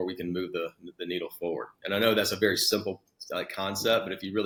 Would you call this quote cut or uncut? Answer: uncut